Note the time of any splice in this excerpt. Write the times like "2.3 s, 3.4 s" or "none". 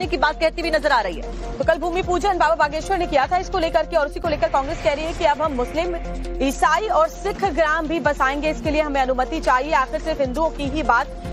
none